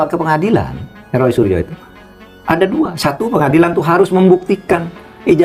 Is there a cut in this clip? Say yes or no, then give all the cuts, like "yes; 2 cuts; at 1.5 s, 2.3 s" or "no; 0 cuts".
no; 0 cuts